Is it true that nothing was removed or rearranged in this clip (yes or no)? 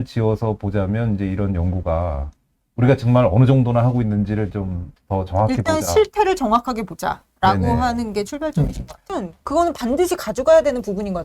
no